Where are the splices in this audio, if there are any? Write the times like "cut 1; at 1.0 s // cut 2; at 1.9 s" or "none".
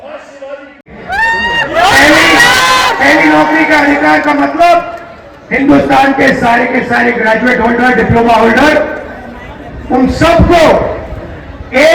cut 1; at 0.9 s